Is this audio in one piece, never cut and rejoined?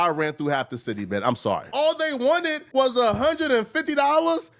no; 1 cut; at 1.7 s

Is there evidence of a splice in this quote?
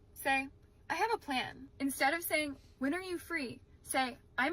yes; 1 cut; at 1.6 s

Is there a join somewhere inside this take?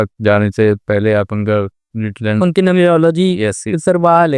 no; 0 cuts

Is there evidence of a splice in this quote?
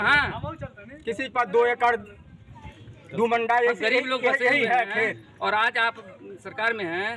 no; 0 cuts

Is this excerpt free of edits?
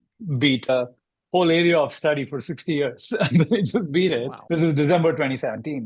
no; 2 cuts; at 0.7 s, 4.3 s

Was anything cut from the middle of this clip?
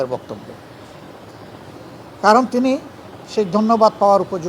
no; 0 cuts

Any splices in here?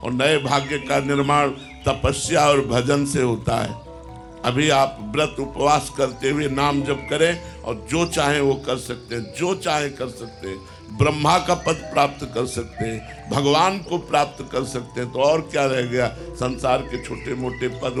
no; 0 cuts

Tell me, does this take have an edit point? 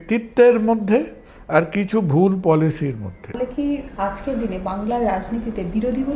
yes; 1 cut; at 3.3 s

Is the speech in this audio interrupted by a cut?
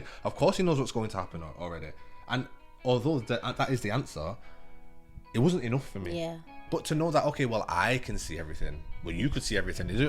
yes; 1 cut; at 6.6 s

